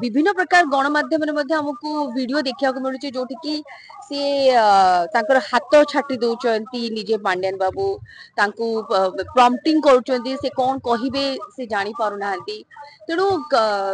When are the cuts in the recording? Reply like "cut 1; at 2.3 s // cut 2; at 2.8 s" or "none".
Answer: none